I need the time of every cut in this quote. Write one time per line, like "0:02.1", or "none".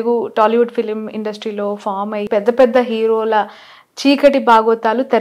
0:02.3